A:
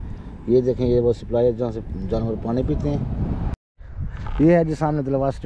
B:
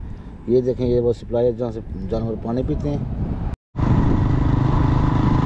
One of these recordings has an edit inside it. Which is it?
A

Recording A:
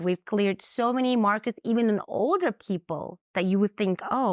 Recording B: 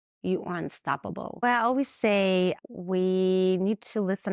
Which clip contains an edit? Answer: B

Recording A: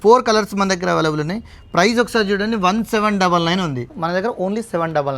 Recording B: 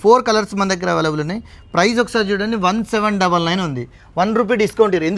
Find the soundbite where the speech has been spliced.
A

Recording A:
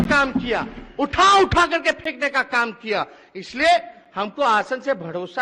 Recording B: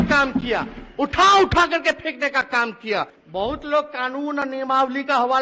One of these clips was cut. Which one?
B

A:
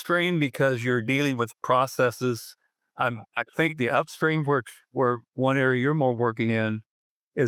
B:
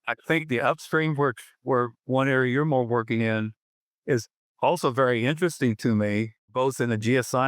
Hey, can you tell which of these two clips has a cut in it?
B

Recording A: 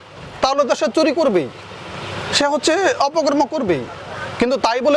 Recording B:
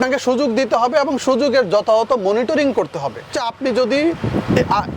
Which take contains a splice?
B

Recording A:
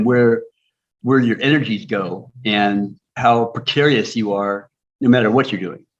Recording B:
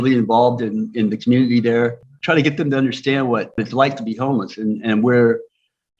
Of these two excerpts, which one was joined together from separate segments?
B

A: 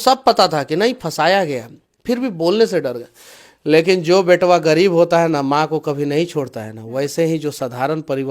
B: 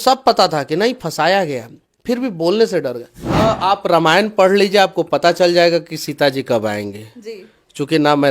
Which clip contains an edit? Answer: B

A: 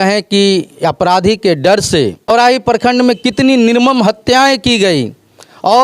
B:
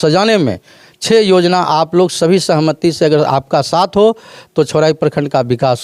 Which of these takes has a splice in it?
A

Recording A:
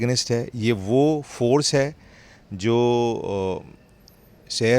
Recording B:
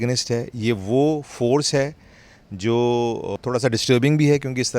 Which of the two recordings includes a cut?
B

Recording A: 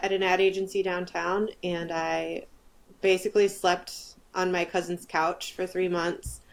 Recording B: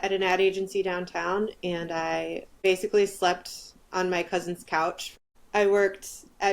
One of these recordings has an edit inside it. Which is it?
B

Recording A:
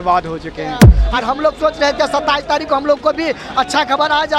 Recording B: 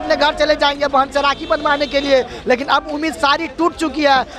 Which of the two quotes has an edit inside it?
A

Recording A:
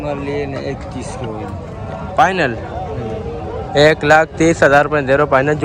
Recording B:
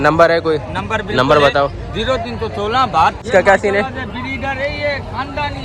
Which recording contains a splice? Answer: B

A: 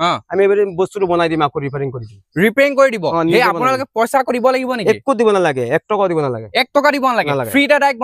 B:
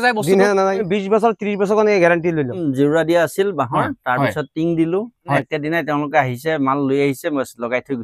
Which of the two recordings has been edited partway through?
B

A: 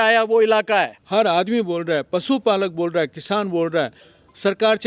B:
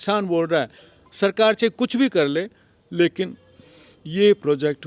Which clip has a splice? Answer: A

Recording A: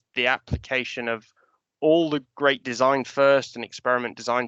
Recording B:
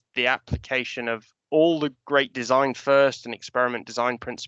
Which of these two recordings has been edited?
B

